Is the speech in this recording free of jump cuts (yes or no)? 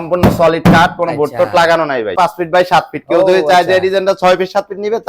no